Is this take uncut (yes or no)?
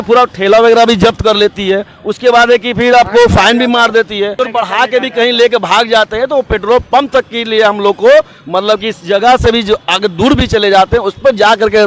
no